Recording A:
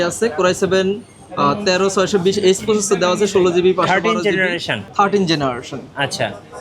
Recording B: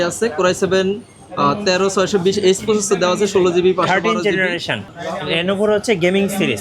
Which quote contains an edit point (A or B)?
B